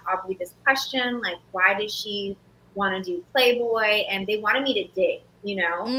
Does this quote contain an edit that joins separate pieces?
no; 0 cuts

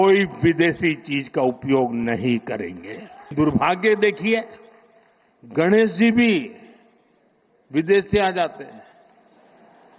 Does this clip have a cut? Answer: yes; 1 cut; at 3.3 s

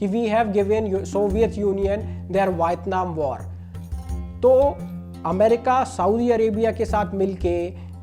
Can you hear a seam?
no; 0 cuts

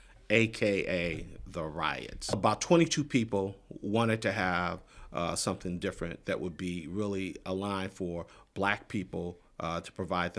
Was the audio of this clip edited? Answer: yes; 1 cut; at 2.3 s

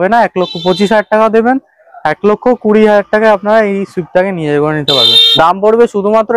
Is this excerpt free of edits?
no; 1 cut; at 5.2 s

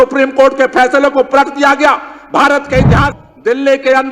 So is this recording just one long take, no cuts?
no; 1 cut; at 3.1 s

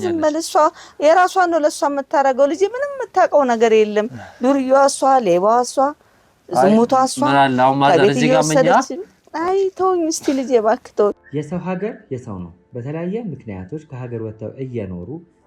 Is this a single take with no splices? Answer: no; 1 cut; at 11.2 s

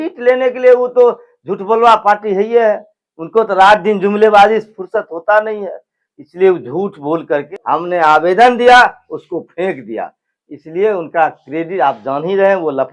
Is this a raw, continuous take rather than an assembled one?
no; 1 cut; at 7.5 s

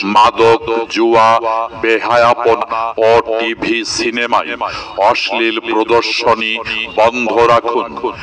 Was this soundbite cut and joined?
yes; 1 cut; at 2.6 s

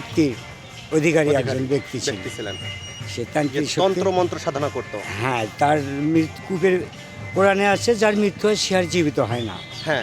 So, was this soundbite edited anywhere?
no; 0 cuts

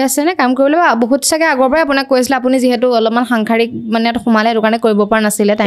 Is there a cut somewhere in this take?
no; 0 cuts

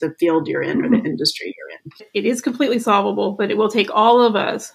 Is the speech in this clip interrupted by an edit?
yes; 1 cut; at 2.1 s

